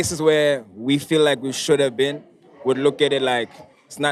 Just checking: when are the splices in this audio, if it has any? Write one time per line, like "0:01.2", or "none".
none